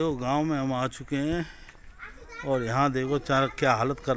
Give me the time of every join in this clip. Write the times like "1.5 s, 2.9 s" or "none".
none